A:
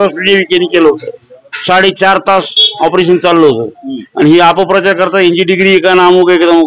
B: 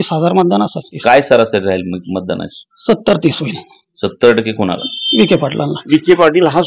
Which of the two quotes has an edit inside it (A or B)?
B